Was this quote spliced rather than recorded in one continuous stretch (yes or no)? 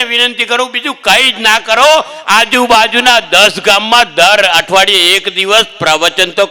no